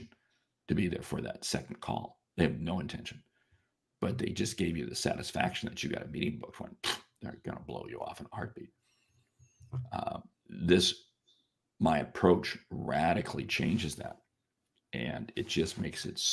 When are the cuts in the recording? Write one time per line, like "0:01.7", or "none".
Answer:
none